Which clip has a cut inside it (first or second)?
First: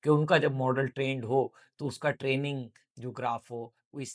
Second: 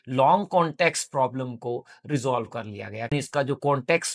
second